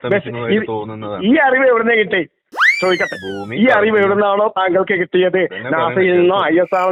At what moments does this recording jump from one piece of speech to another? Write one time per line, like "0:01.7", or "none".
none